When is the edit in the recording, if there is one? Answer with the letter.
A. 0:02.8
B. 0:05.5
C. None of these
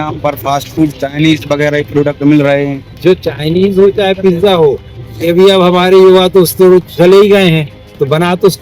A